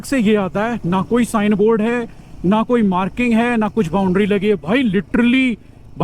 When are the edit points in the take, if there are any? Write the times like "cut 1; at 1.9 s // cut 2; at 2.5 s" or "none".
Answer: none